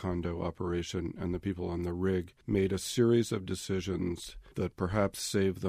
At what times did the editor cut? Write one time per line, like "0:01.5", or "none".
0:02.4
0:04.4